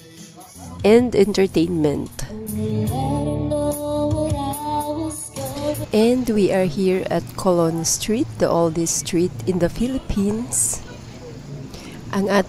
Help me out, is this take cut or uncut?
uncut